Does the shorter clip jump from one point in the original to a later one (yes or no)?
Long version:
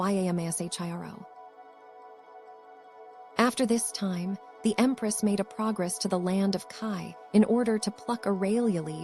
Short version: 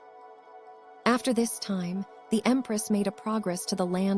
yes